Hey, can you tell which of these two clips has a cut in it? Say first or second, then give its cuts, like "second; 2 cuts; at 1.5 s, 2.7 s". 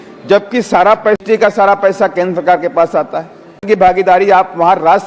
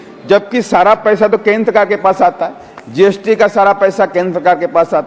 first; 2 cuts; at 1.2 s, 4.0 s